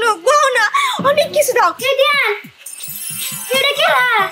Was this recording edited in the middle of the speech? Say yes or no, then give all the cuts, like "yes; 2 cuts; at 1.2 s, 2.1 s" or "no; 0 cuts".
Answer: yes; 1 cut; at 1.8 s